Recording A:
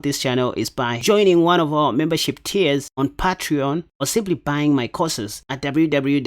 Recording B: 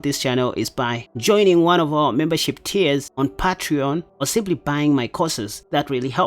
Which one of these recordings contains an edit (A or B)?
A